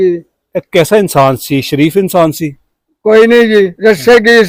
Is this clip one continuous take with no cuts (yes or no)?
yes